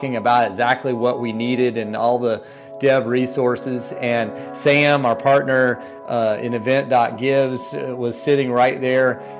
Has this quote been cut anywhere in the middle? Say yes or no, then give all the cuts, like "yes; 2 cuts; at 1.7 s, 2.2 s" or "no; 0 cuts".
no; 0 cuts